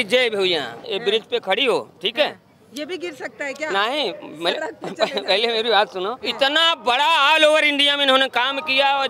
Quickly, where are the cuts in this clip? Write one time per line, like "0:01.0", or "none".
0:00.9
0:06.2